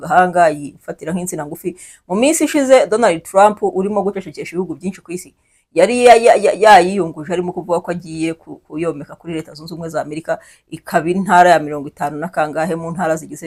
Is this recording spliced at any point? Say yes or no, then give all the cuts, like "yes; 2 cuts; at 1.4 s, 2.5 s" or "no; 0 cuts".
no; 0 cuts